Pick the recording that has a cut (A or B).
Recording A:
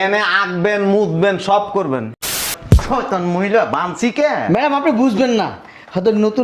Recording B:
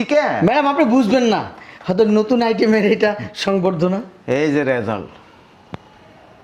A